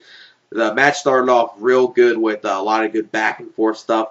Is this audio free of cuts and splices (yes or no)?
yes